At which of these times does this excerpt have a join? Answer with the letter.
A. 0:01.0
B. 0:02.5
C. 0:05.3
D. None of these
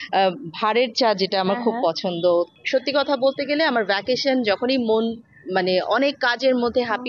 B